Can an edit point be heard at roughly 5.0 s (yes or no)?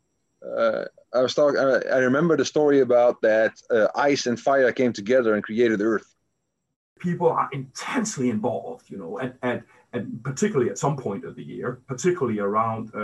no